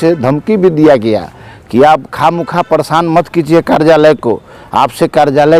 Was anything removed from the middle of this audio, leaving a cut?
no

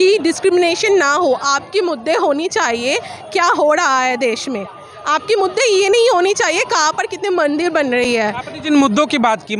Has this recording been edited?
no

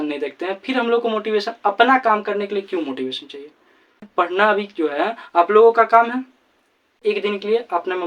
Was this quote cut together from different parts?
yes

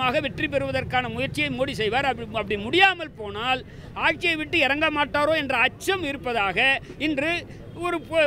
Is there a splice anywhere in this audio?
no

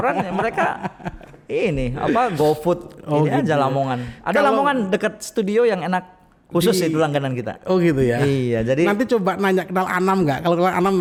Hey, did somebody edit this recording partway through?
no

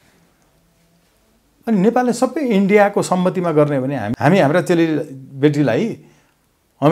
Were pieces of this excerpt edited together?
yes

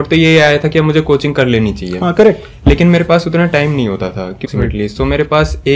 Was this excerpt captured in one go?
no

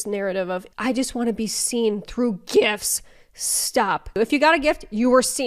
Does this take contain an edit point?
no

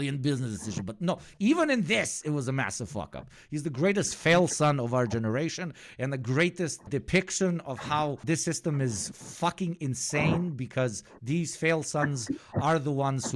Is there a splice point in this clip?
yes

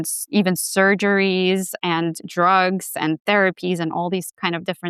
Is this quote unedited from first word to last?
yes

